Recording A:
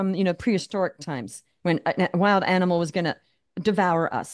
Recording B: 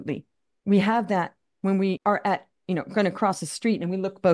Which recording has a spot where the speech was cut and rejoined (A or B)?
B